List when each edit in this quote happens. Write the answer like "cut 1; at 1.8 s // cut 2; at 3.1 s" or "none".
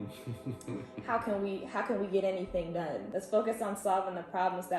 cut 1; at 3.1 s